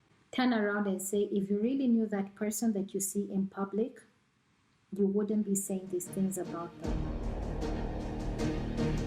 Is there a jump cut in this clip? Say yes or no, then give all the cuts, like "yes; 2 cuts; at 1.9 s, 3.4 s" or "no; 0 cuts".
yes; 1 cut; at 6.7 s